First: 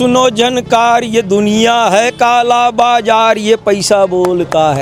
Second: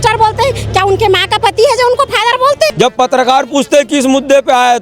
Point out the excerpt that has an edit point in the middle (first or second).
second